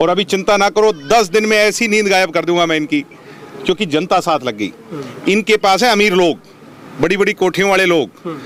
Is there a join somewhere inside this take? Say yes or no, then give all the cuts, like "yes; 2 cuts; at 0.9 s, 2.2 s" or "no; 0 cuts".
no; 0 cuts